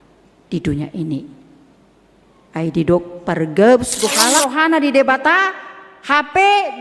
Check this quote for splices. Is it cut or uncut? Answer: cut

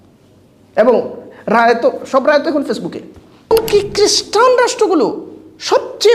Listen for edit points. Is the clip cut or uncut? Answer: cut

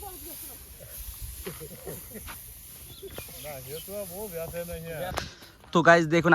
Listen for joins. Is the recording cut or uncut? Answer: cut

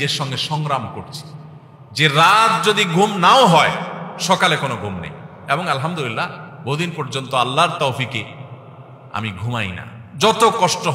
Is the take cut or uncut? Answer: uncut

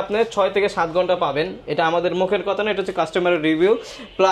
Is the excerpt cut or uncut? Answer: uncut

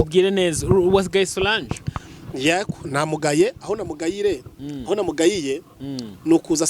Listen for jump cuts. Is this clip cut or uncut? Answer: uncut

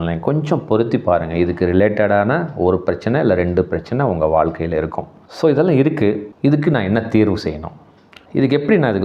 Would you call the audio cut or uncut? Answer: cut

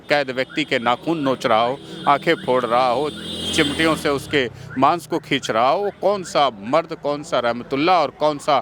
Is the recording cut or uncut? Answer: uncut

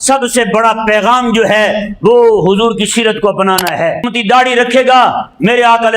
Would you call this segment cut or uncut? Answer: cut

